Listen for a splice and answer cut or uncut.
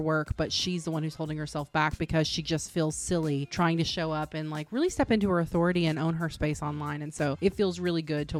uncut